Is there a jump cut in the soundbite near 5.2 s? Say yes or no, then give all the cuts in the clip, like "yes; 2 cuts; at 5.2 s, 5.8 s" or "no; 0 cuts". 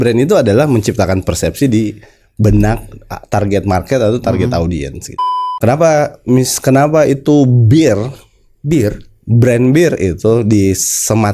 yes; 1 cut; at 5.2 s